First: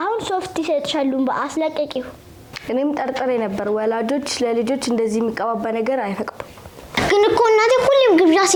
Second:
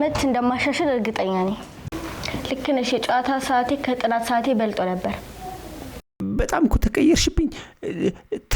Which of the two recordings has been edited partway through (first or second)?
second